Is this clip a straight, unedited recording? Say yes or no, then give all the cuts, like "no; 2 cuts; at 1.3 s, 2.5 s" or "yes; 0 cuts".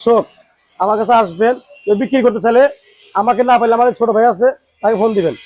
yes; 0 cuts